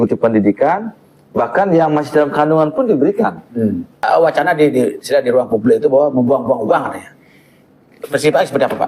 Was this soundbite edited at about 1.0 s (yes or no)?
no